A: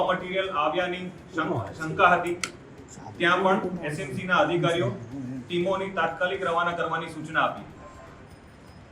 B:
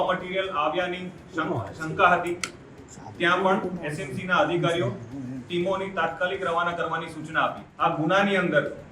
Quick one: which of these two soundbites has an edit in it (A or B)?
B